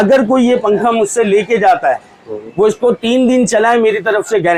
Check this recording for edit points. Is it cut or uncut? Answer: uncut